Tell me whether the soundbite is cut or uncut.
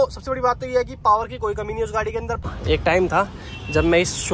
cut